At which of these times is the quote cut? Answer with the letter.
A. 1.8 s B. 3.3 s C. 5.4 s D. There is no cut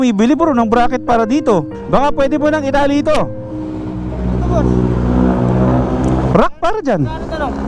A